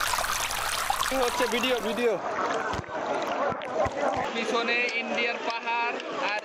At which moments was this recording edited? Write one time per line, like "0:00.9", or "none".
0:04.2